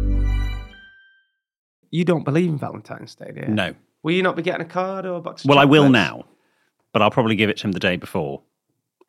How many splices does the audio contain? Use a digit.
1